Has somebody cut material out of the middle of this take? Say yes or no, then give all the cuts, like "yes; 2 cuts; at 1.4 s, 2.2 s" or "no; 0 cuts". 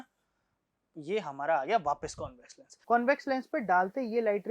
yes; 1 cut; at 2.7 s